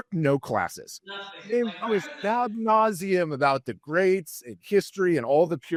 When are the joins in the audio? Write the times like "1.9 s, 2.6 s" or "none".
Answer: none